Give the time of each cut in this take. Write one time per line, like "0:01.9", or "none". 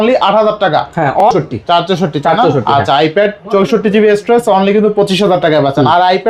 0:01.2